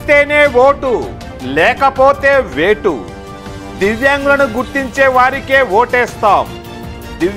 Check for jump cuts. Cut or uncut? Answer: uncut